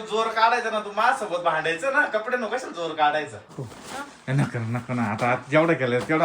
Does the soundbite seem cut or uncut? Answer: cut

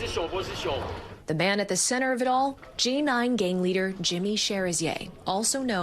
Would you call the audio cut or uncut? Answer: uncut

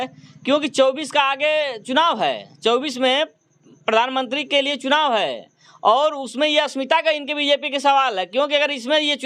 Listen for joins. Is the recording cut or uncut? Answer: uncut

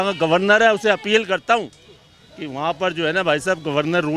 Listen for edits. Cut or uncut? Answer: uncut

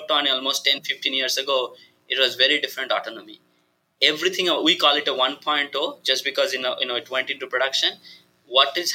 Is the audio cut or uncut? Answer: uncut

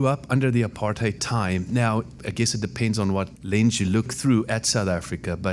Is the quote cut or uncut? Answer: cut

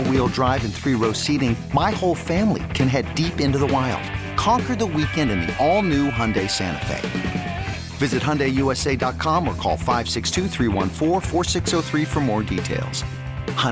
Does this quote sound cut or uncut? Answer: uncut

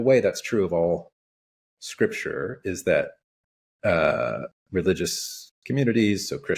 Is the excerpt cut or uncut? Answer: uncut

